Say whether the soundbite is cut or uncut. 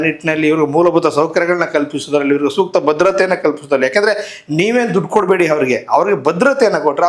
uncut